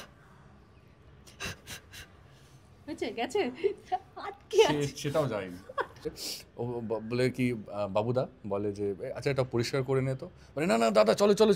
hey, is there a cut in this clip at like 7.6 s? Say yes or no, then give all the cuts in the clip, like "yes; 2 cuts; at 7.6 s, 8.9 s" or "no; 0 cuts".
no; 1 cut; at 6.0 s